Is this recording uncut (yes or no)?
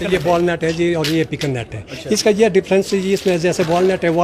yes